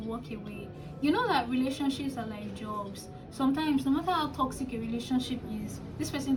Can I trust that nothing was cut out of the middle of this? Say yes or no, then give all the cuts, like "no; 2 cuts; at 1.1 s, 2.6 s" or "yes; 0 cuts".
yes; 0 cuts